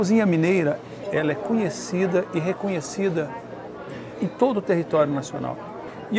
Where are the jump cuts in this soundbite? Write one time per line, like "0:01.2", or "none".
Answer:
0:00.9